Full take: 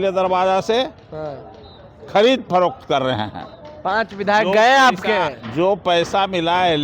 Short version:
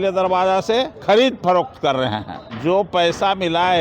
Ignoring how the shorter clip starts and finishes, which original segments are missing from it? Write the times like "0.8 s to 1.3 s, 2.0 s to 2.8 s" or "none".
0.9 s to 2.0 s, 3.5 s to 5.4 s